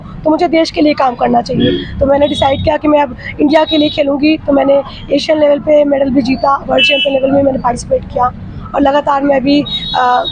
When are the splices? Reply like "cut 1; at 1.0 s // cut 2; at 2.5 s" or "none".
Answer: none